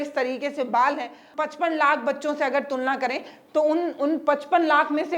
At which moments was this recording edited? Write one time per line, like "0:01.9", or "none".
0:01.3